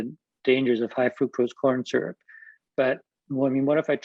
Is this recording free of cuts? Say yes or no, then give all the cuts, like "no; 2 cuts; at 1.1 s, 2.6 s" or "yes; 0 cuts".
yes; 0 cuts